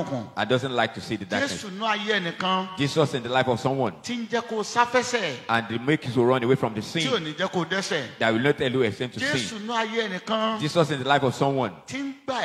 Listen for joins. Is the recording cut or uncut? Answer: uncut